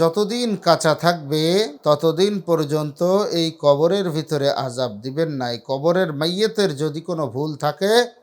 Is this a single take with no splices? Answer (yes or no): no